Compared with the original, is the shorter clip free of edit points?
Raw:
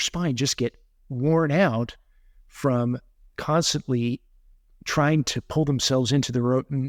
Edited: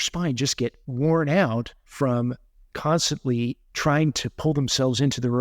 no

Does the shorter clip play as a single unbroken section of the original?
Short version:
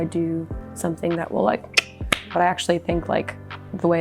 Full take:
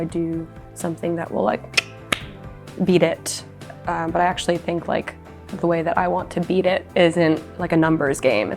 no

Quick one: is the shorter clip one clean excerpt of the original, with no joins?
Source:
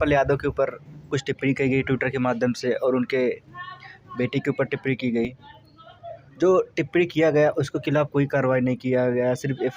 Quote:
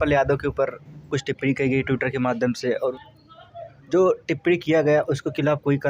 no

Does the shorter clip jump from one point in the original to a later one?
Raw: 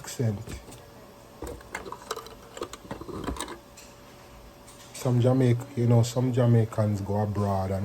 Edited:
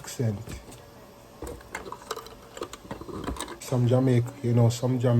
yes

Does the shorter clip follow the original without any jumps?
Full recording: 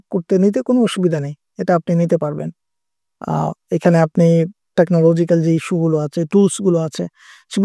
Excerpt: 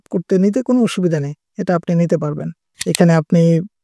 no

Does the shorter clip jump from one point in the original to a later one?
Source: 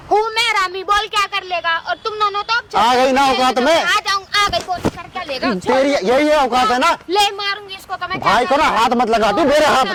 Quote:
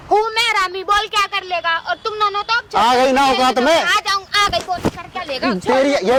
no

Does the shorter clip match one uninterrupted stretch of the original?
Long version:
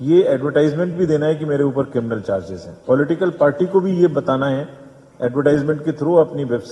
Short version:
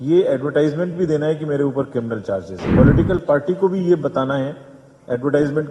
no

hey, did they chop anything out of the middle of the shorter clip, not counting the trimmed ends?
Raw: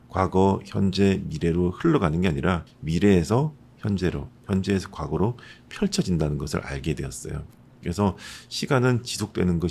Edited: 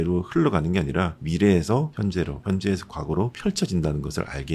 yes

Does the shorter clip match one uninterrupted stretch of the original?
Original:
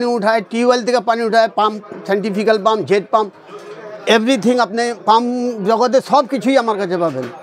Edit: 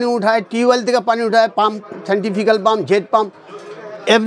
yes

